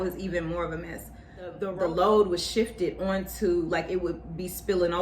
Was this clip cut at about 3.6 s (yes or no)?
no